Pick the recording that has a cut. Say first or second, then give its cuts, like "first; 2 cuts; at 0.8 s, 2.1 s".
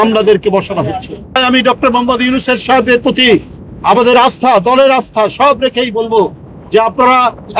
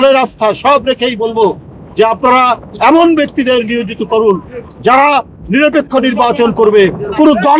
first; 1 cut; at 1.4 s